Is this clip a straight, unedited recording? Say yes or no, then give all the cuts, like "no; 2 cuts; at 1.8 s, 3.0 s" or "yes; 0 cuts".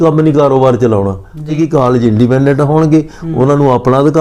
no; 1 cut; at 1.6 s